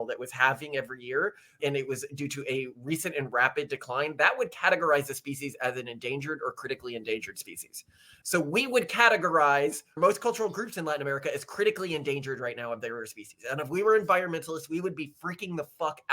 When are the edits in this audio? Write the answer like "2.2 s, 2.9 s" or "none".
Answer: 10.0 s